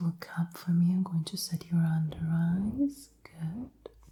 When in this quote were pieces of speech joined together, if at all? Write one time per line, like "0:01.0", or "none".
none